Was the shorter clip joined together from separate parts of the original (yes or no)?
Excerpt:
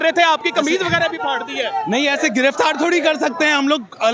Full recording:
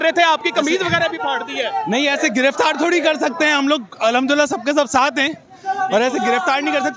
no